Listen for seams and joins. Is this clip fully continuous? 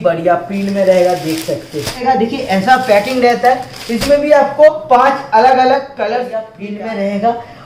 no; 2 cuts; at 2.0 s, 6.6 s

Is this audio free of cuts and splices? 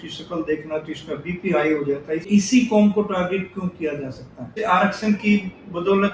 no; 2 cuts; at 2.3 s, 4.6 s

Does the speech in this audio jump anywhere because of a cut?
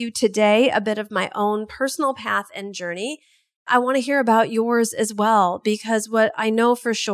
yes; 1 cut; at 3.7 s

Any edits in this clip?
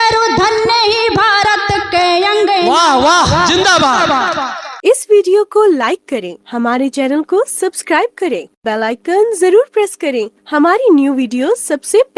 yes; 1 cut; at 4.6 s

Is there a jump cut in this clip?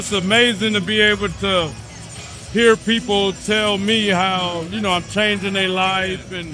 no; 0 cuts

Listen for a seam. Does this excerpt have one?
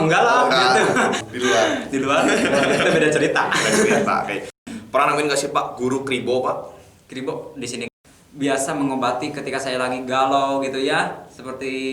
yes; 3 cuts; at 1.2 s, 4.6 s, 7.7 s

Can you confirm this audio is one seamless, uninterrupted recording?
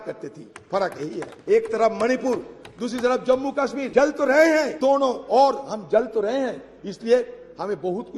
no; 3 cuts; at 1.3 s, 3.8 s, 4.7 s

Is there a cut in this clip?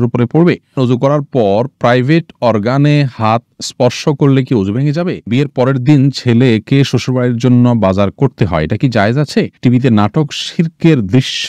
yes; 3 cuts; at 0.8 s, 5.3 s, 9.6 s

